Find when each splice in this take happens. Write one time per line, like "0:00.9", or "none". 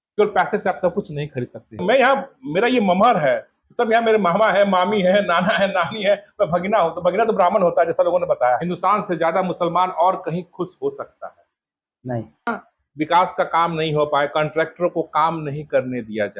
0:01.8
0:08.6
0:12.5